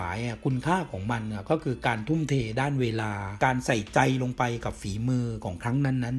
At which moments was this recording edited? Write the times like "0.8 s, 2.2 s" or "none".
none